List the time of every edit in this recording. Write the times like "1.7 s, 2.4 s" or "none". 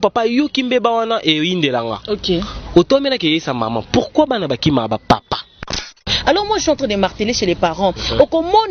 6.1 s